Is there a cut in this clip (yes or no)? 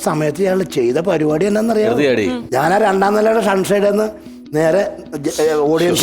yes